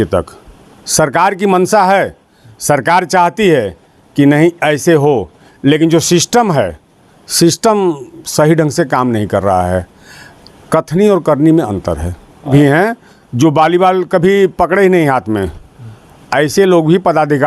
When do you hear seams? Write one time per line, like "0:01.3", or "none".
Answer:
0:12.5